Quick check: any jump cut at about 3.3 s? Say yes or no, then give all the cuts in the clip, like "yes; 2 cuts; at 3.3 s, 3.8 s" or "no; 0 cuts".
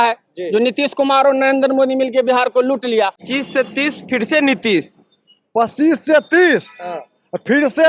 yes; 1 cut; at 3.3 s